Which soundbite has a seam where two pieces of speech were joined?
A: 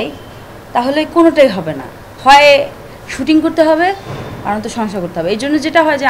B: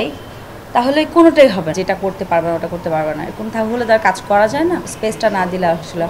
B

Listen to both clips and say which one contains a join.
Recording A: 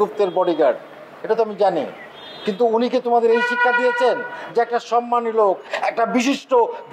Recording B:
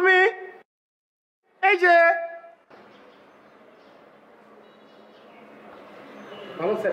A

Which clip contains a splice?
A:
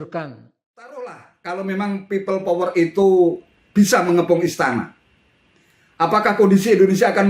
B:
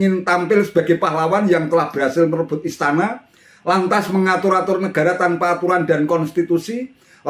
A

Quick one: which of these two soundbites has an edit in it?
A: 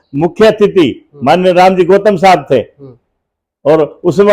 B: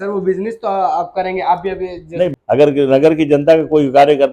B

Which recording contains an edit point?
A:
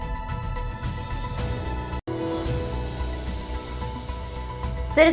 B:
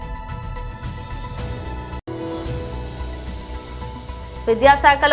A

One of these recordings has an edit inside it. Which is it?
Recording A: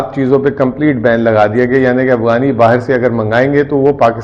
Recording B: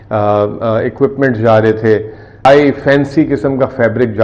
B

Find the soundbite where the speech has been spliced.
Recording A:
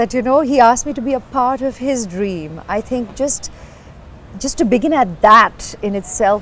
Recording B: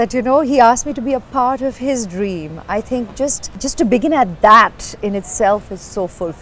B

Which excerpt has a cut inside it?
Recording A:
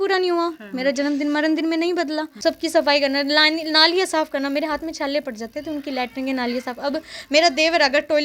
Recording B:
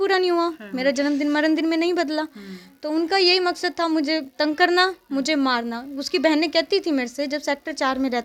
A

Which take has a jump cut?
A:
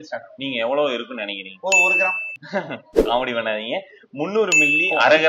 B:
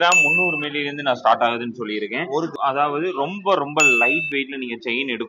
B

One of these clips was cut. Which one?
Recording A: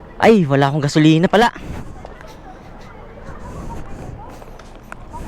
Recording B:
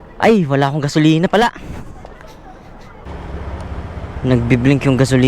B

